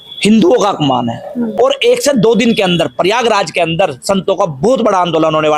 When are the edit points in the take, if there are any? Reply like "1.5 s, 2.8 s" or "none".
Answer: 1.5 s

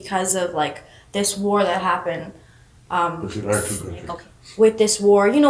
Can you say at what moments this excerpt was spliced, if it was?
4.1 s

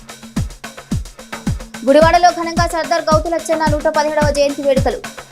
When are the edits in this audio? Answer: 1.5 s

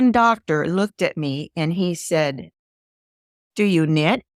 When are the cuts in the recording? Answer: none

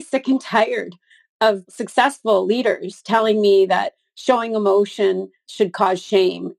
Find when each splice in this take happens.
1.7 s, 5.5 s

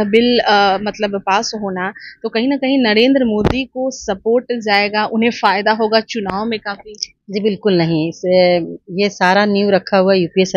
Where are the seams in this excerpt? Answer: none

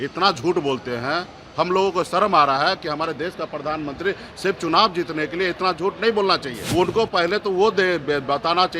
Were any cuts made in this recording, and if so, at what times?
6.6 s

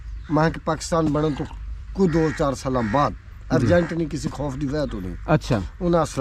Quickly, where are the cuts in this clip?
none

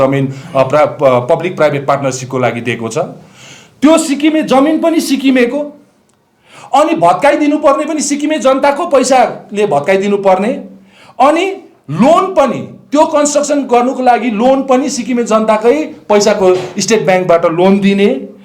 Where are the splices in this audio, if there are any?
none

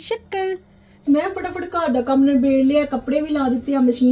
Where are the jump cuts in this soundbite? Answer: 1.0 s

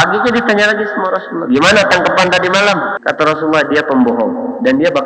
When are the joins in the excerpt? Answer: 2.9 s

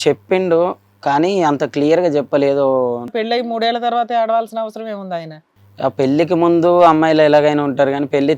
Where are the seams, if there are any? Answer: 3.1 s, 5.4 s

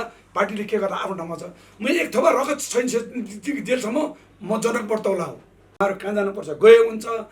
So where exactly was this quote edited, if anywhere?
5.8 s

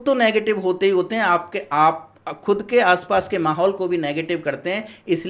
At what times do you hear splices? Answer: none

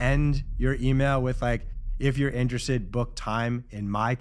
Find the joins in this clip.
none

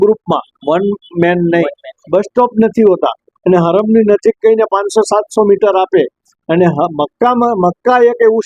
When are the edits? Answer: 1.9 s

